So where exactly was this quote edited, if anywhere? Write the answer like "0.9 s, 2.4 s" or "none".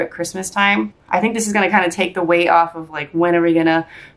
1.0 s

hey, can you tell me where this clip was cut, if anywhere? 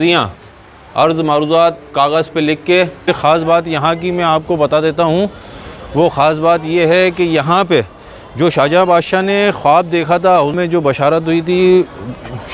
3.1 s

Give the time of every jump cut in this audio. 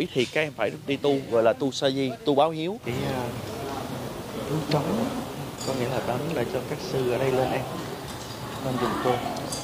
2.9 s

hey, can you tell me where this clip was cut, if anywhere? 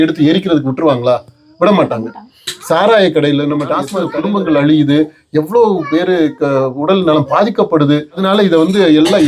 4.0 s, 8.2 s

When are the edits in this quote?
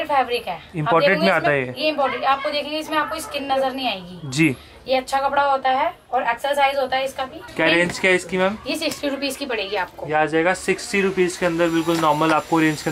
7.4 s

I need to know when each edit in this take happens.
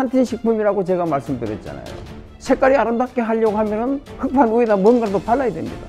2.3 s

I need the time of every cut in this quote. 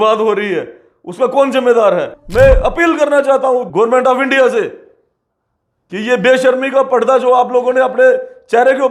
2.2 s, 3.7 s

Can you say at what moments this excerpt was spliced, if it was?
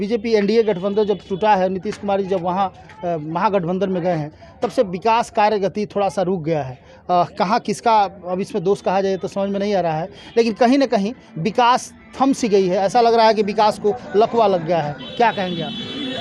none

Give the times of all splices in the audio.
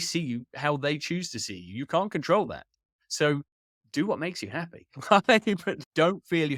none

